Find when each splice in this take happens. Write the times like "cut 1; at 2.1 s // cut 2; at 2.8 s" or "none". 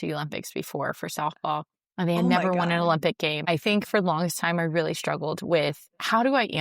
cut 1; at 3.4 s